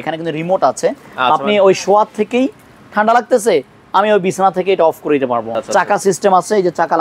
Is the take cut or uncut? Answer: cut